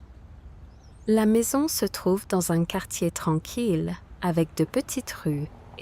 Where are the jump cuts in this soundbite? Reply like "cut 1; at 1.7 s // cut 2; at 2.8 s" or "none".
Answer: cut 1; at 1.0 s